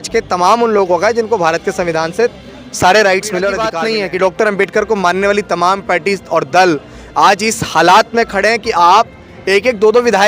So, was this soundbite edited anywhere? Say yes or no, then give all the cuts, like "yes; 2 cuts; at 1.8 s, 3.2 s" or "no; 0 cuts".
yes; 1 cut; at 3.8 s